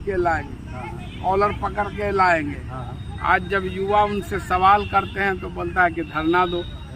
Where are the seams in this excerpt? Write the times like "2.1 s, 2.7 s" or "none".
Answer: none